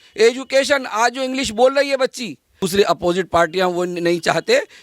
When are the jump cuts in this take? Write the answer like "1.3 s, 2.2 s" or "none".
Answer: 2.6 s